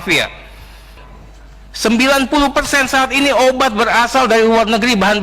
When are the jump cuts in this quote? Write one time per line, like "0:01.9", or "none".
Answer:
0:01.0